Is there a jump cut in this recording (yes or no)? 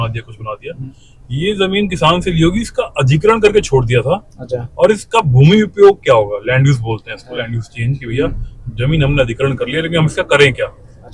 no